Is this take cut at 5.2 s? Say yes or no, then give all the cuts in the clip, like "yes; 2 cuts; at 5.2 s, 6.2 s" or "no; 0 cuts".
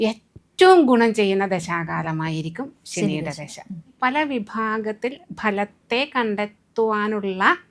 no; 1 cut; at 3.9 s